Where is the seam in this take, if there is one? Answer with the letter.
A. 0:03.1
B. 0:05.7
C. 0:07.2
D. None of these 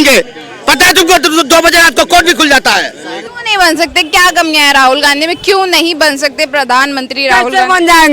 A